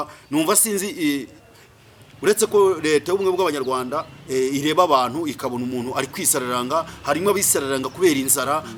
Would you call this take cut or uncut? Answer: uncut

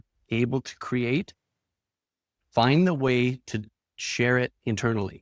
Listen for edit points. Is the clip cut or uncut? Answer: uncut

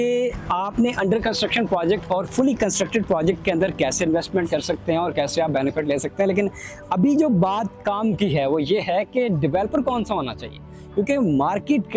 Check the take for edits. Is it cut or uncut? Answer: uncut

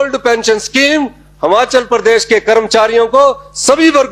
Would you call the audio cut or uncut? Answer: uncut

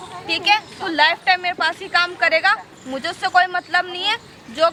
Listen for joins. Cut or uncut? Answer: uncut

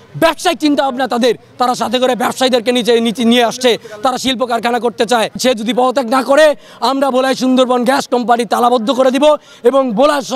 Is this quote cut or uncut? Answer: cut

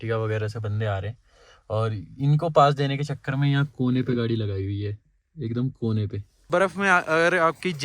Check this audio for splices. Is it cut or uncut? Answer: cut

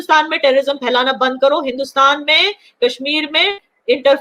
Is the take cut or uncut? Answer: uncut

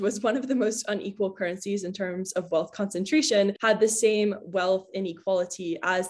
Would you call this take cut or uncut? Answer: uncut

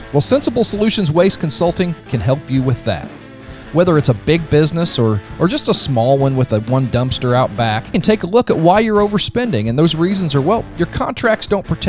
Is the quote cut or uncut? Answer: cut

